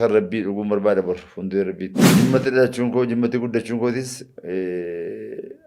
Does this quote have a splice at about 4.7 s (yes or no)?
no